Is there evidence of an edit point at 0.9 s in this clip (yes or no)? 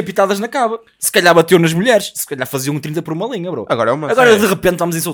no